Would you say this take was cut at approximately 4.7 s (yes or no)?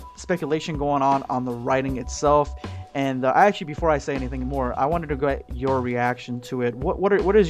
yes